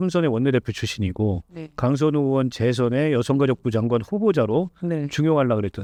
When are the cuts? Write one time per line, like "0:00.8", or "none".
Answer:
none